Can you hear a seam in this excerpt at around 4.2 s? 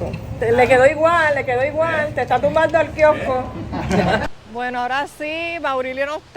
yes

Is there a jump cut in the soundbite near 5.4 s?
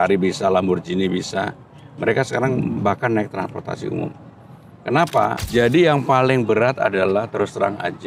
yes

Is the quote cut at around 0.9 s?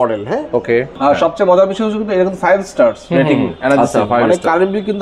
yes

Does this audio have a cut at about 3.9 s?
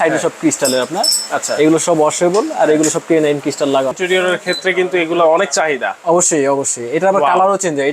yes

